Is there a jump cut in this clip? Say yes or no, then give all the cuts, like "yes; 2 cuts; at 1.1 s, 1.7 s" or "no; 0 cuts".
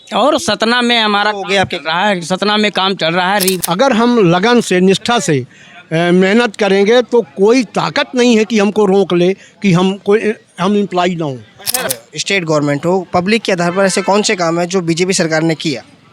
yes; 2 cuts; at 3.6 s, 11.9 s